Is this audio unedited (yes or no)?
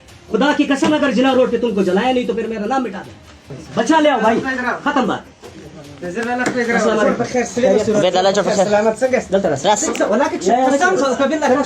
yes